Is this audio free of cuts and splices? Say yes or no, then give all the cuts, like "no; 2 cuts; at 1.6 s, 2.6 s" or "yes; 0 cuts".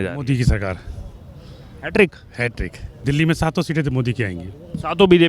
no; 1 cut; at 2.9 s